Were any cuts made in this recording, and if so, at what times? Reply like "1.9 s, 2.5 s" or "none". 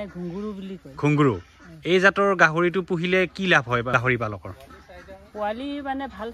3.9 s